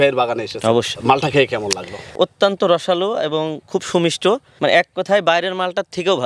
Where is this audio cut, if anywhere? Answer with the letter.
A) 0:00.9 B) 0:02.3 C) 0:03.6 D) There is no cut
A